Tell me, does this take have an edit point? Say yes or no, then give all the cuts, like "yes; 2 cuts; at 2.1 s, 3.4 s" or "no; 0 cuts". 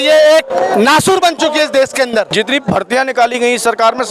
yes; 1 cut; at 2.3 s